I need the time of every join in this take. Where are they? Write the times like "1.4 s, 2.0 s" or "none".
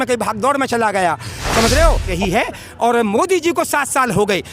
2.1 s